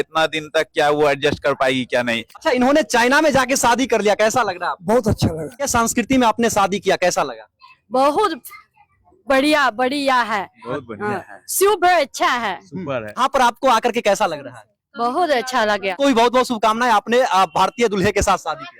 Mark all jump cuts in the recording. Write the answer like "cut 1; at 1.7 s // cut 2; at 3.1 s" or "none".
cut 1; at 2.3 s // cut 2; at 5.7 s // cut 3; at 13.2 s // cut 4; at 16.0 s